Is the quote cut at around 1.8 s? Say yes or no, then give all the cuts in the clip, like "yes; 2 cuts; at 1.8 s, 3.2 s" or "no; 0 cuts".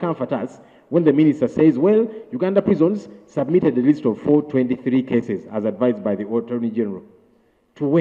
no; 0 cuts